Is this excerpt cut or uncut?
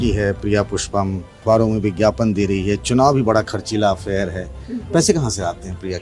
cut